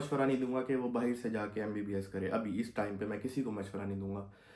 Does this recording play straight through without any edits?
yes; 0 cuts

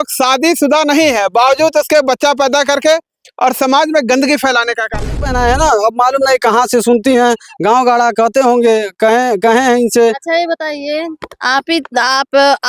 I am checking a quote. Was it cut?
yes; 1 cut; at 5.3 s

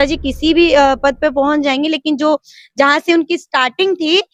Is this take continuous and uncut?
yes; 0 cuts

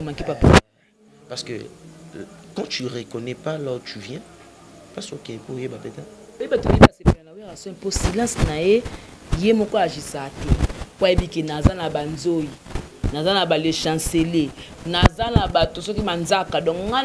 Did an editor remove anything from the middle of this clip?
yes; 1 cut; at 6.4 s

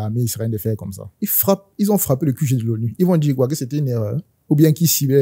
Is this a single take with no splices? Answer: yes; 0 cuts

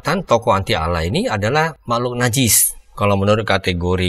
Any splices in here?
yes; 1 cut; at 1.8 s

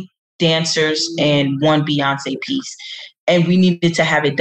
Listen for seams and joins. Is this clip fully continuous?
yes; 0 cuts

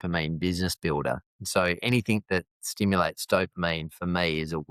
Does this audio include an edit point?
no; 0 cuts

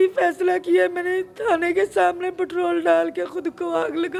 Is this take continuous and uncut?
yes; 0 cuts

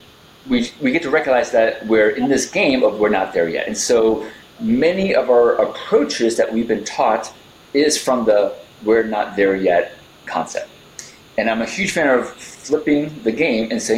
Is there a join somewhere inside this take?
no; 0 cuts

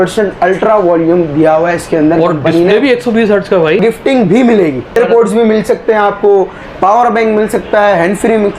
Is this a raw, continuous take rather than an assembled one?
no; 2 cuts; at 3.8 s, 5.0 s

